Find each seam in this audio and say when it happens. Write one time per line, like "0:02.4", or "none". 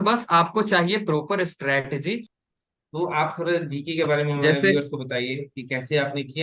0:02.3